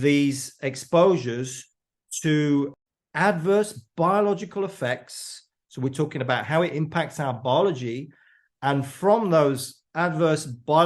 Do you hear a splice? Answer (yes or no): yes